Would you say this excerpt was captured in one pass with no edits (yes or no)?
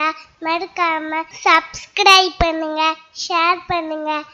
no